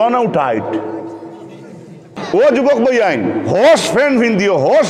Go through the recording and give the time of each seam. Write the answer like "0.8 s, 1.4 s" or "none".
2.1 s